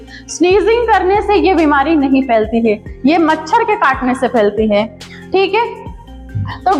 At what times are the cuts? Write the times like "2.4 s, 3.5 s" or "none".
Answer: none